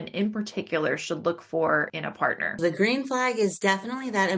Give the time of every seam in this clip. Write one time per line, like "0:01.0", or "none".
0:02.5
0:03.6